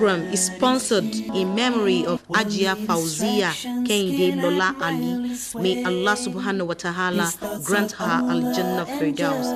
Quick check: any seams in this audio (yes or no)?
no